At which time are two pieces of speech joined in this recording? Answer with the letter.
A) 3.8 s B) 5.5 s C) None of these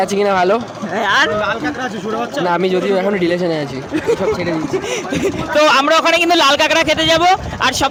C